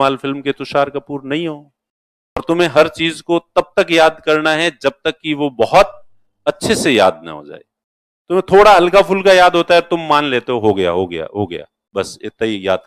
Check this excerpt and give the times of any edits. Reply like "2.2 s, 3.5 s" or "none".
2.4 s